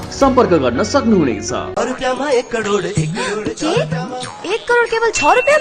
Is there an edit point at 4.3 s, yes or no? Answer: no